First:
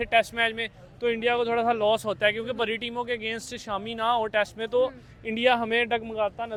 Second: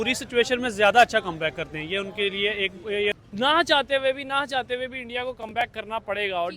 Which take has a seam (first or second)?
second